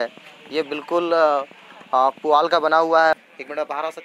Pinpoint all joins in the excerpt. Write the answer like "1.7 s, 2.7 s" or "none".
3.1 s

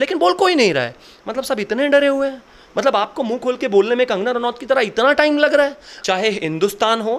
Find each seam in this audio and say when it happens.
5.9 s

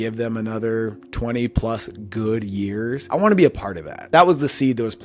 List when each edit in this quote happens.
1.0 s, 3.0 s, 4.1 s

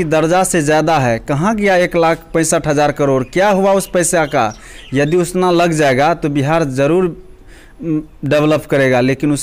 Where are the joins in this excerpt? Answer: none

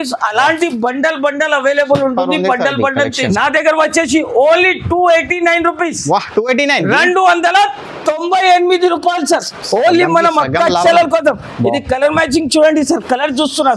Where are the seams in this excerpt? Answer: 3.2 s

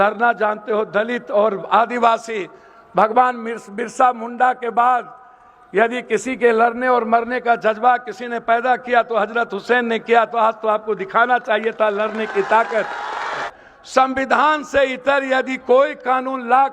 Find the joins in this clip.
13.5 s

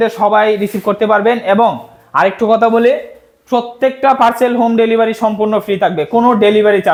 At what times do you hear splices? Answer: none

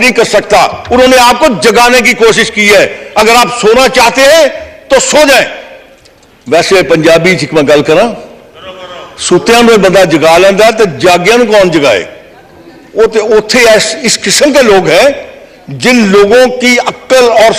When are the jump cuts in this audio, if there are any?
none

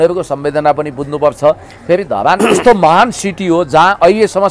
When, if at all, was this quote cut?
none

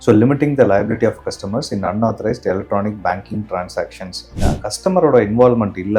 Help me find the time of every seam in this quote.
4.4 s

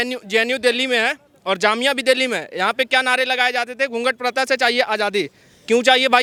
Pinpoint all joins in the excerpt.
none

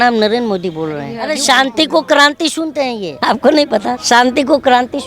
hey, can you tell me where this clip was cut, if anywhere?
1.2 s, 3.1 s, 4.0 s

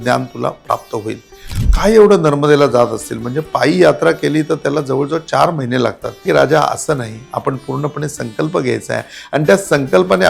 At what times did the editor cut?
1.4 s, 6.2 s

